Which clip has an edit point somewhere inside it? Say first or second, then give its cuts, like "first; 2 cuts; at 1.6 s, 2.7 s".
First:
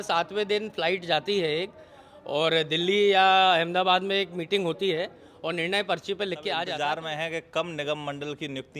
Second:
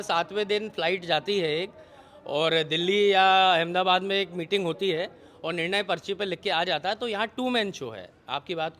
first; 1 cut; at 6.7 s